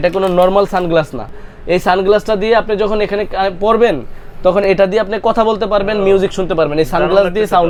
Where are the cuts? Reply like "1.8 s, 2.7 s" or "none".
none